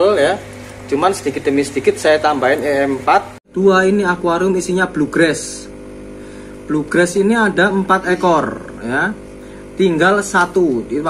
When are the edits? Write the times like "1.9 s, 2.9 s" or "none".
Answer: 3.4 s